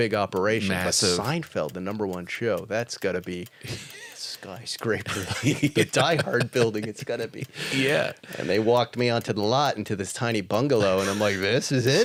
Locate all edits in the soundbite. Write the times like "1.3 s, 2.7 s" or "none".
none